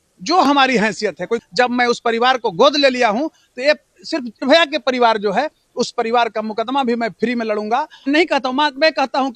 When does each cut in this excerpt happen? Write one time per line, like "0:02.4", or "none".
0:01.4
0:04.4
0:08.0